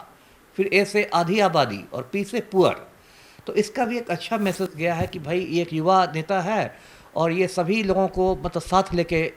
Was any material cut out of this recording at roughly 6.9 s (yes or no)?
no